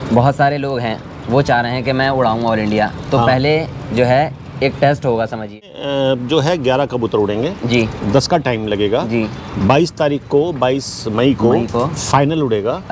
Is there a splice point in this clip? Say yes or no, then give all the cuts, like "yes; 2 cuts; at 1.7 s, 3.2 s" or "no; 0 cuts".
yes; 1 cut; at 5.6 s